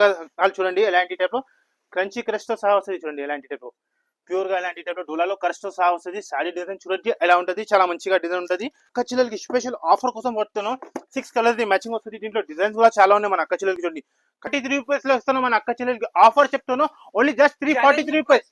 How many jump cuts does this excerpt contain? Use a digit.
2